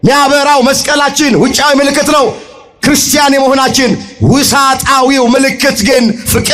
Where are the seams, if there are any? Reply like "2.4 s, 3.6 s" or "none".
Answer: none